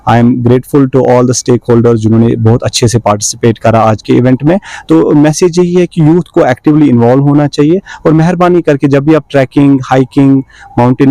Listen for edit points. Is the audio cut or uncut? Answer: uncut